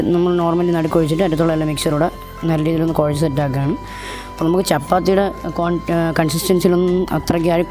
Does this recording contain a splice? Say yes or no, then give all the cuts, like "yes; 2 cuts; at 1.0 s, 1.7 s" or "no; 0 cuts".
no; 0 cuts